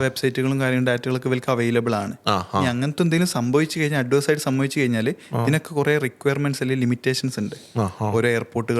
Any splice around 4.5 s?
no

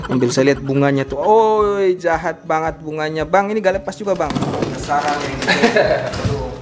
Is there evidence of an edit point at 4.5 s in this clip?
yes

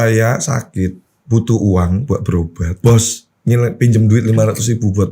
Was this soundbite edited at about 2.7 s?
yes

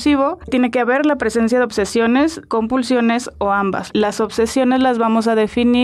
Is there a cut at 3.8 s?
yes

